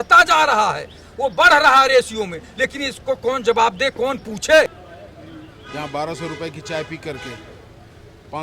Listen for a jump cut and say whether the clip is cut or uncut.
cut